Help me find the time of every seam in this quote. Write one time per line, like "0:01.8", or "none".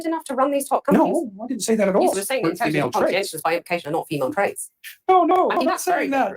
none